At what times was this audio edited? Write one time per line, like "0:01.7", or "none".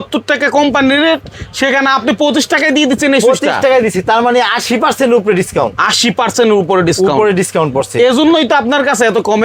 none